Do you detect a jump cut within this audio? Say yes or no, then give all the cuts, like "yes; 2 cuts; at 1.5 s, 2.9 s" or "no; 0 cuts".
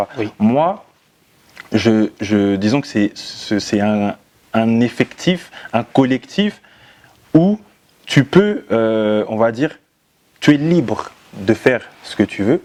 no; 0 cuts